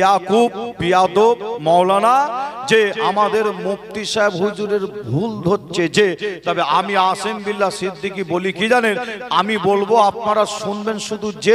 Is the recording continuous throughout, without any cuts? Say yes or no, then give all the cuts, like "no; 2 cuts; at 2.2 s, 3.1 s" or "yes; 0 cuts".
yes; 0 cuts